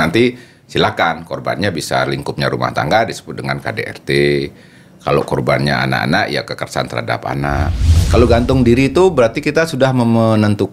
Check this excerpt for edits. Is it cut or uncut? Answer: cut